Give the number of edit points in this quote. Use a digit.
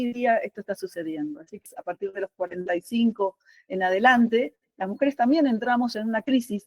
1